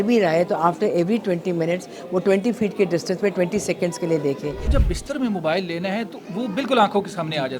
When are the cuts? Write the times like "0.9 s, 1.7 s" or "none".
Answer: 4.6 s